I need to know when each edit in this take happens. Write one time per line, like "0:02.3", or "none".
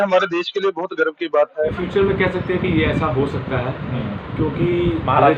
0:01.7